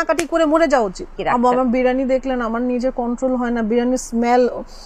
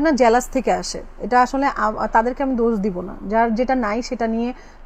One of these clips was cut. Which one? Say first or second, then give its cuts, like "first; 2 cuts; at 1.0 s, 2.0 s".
first; 1 cut; at 1.1 s